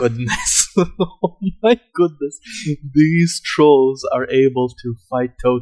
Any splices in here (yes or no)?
no